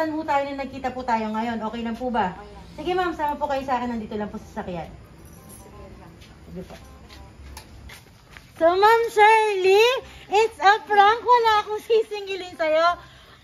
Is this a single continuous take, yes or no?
no